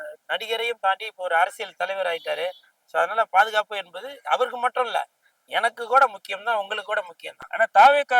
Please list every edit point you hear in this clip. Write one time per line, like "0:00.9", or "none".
none